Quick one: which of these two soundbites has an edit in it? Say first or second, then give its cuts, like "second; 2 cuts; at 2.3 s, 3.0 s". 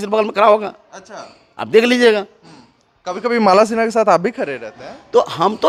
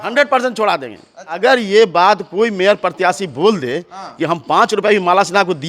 second; 1 cut; at 1.3 s